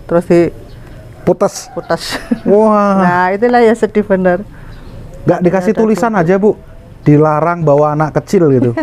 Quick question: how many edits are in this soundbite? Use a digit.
0